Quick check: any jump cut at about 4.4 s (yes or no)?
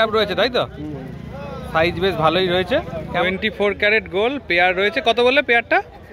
no